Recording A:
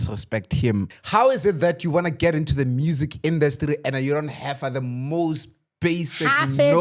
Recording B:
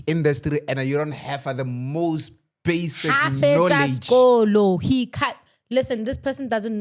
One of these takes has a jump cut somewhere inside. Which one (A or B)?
A